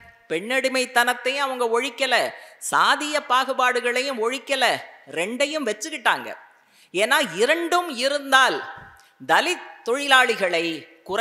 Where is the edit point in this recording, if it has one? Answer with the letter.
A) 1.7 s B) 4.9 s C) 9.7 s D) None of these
D